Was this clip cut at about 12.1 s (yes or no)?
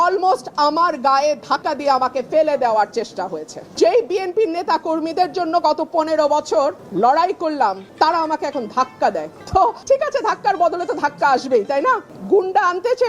yes